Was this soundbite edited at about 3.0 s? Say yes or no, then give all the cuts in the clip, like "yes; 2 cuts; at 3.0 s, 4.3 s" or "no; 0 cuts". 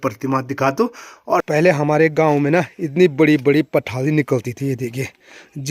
no; 1 cut; at 1.5 s